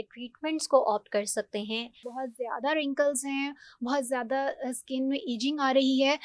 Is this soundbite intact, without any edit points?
no; 1 cut; at 2.0 s

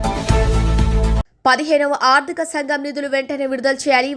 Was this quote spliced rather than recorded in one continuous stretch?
no; 0 cuts

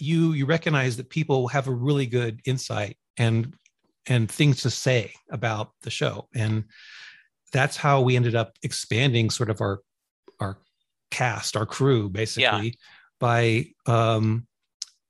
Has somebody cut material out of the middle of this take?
no; 0 cuts

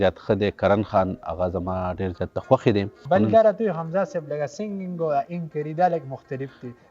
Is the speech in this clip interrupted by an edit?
yes; 1 cut; at 3.0 s

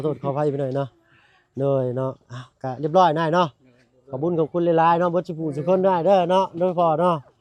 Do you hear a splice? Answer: no; 0 cuts

